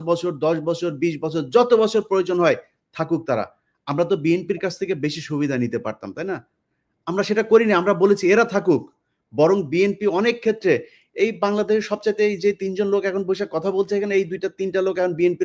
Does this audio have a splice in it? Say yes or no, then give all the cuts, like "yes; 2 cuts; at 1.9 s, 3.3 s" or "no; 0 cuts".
no; 0 cuts